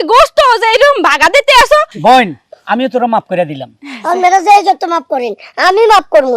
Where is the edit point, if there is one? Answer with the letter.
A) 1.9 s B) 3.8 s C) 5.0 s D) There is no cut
A